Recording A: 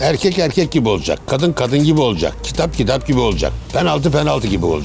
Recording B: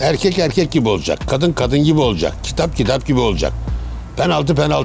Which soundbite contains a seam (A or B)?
A